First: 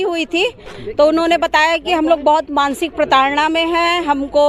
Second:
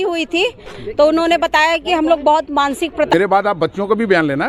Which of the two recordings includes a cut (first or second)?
second